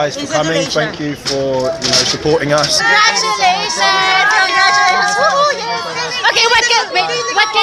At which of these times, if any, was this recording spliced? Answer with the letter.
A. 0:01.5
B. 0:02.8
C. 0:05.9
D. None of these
B